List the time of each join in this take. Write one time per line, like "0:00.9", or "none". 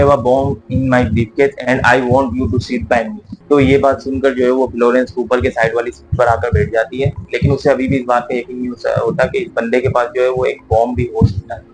none